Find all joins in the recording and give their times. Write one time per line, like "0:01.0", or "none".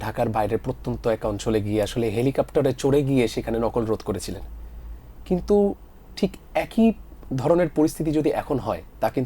none

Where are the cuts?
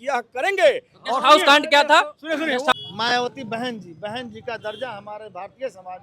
0:02.7

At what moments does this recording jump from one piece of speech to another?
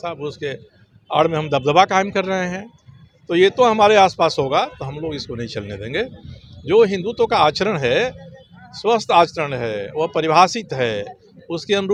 none

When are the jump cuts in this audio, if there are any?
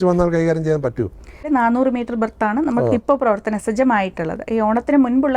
0:01.4

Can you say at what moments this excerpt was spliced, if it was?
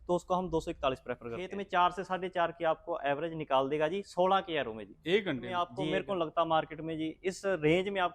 0:01.6
0:05.7

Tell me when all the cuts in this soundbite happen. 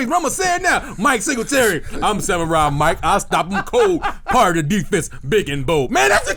none

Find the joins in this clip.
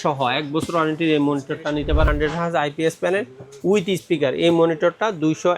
0:02.1

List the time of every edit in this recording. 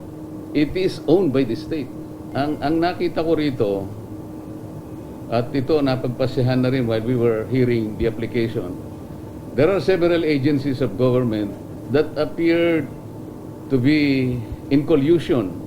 0:02.2
0:11.7

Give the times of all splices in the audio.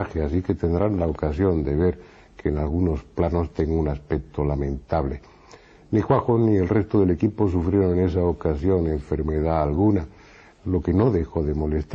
none

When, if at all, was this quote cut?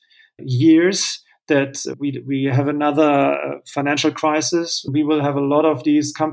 0:01.9
0:04.8

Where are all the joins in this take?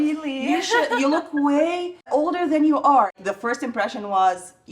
0:02.1
0:03.1

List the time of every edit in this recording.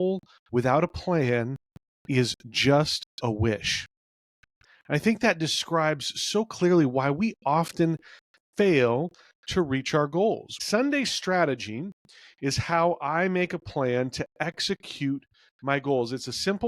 0:10.6

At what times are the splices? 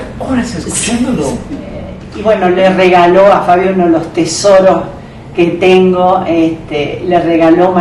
0:02.0

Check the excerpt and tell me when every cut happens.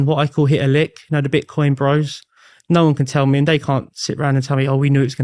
none

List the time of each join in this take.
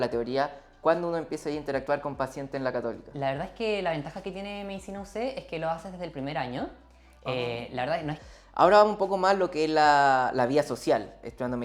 0:08.2

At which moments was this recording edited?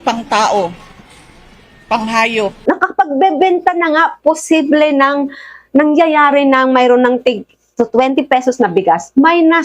0:02.6

